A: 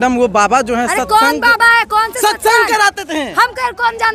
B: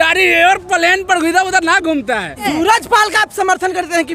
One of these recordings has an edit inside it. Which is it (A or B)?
B